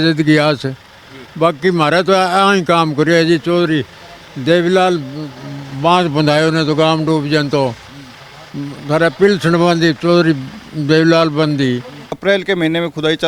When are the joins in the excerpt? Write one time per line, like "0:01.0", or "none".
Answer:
0:12.1